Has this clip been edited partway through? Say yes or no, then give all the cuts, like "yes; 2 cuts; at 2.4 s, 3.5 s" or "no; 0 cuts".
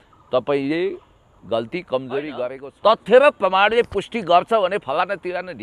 yes; 1 cut; at 2.6 s